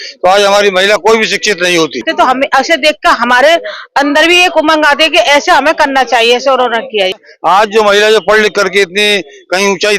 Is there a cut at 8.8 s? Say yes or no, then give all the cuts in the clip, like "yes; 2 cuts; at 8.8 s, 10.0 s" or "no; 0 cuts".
no; 2 cuts; at 2.1 s, 7.2 s